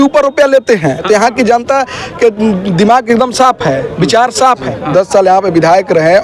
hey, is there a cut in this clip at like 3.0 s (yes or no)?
no